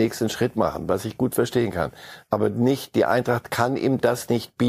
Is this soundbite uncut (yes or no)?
yes